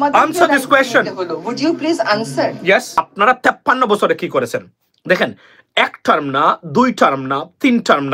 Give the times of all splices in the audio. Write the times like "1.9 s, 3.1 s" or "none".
3.0 s